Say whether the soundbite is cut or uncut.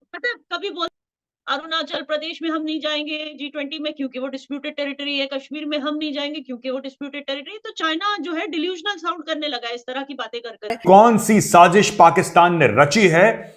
cut